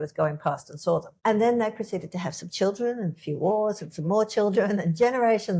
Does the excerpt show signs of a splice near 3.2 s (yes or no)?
no